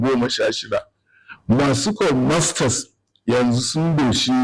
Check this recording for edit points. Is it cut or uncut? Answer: uncut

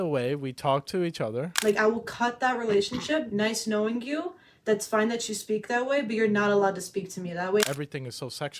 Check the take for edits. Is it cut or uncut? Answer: cut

